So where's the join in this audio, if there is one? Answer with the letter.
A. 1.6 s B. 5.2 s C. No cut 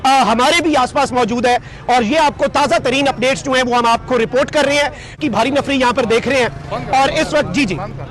B